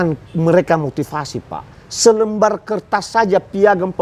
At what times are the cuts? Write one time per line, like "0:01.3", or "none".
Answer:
none